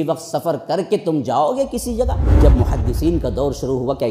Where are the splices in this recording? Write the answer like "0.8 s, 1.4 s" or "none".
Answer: 2.4 s